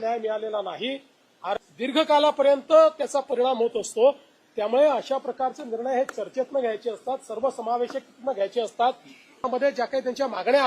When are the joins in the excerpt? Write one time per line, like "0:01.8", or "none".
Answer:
0:01.5
0:09.5